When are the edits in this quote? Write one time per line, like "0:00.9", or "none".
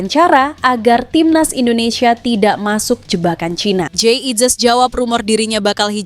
0:03.9